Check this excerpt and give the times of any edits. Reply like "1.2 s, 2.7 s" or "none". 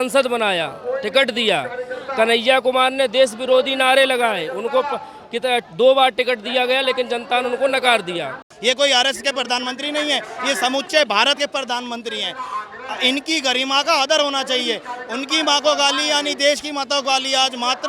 8.4 s